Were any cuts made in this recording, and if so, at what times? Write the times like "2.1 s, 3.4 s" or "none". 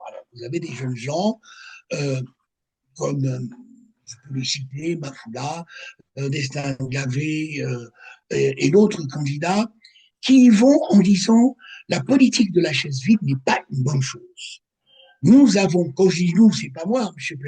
none